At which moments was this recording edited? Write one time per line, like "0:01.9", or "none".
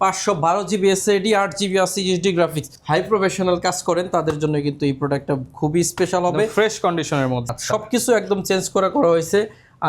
0:02.7
0:07.5